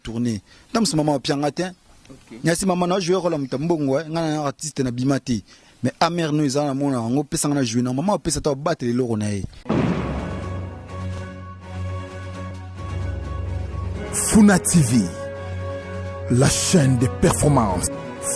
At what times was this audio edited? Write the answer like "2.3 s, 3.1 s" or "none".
9.5 s